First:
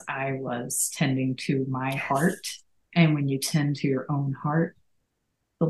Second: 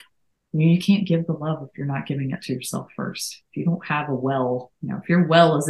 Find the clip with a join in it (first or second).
second